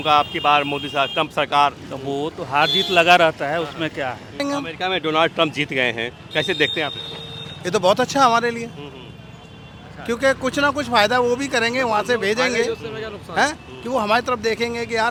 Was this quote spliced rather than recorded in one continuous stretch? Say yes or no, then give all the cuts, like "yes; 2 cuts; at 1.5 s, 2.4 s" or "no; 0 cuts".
no; 0 cuts